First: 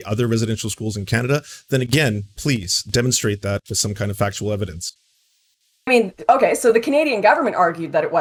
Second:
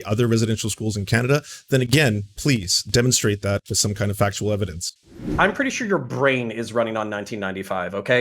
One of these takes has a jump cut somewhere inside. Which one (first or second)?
second